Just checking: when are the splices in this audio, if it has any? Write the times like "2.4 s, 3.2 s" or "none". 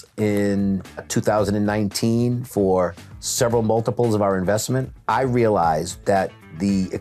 1.1 s, 4.9 s

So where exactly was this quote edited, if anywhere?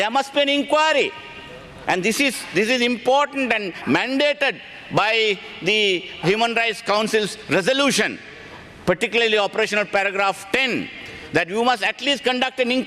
none

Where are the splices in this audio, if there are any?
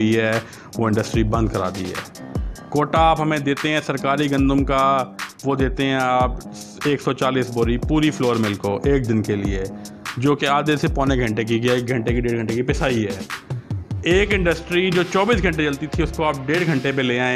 none

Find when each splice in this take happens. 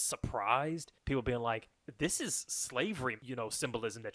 0.9 s, 1.8 s, 3.2 s

